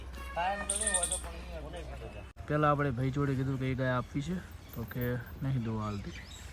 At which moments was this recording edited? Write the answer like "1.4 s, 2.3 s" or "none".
2.3 s